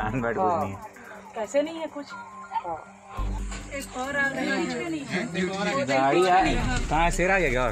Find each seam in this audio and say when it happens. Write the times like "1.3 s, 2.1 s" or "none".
3.4 s